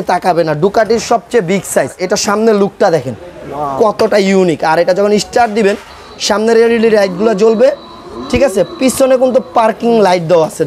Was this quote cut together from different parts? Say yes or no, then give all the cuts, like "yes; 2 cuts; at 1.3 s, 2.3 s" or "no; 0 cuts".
yes; 1 cut; at 2.0 s